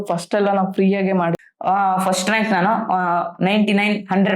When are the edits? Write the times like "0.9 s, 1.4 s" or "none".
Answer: 1.4 s